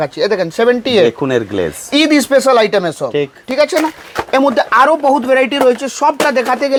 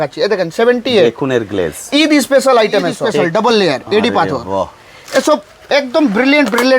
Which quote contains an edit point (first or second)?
second